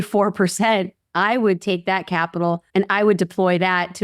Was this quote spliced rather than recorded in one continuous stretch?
yes; 1 cut; at 2.6 s

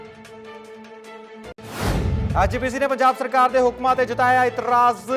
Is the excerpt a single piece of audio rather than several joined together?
no; 1 cut; at 2.3 s

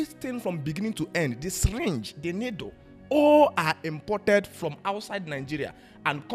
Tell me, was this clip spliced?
no; 0 cuts

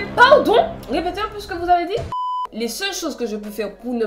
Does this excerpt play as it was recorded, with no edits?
no; 1 cut; at 2.1 s

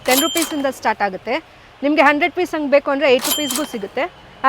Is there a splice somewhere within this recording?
no; 0 cuts

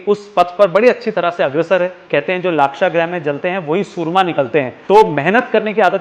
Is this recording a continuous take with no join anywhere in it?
no; 2 cuts; at 2.0 s, 4.8 s

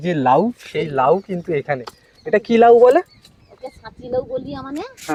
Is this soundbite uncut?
yes; 0 cuts

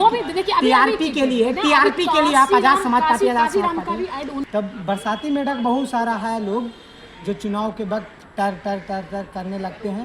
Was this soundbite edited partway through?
yes; 1 cut; at 4.5 s

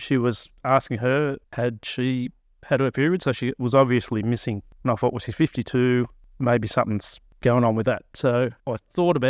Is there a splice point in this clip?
yes; 3 cuts; at 4.7 s, 6.2 s, 7.3 s

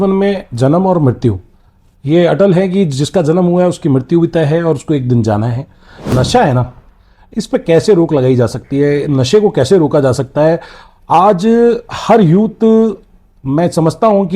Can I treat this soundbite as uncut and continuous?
no; 1 cut; at 6.1 s

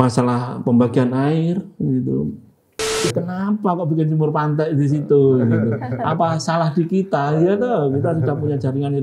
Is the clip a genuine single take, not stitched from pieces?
no; 1 cut; at 3.0 s

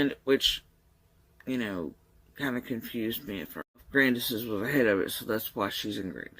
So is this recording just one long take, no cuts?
no; 1 cut; at 3.9 s

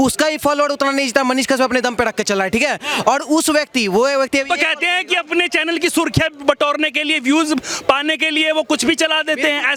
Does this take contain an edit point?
no; 0 cuts

